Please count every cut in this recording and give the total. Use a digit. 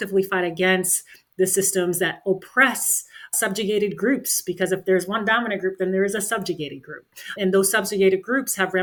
0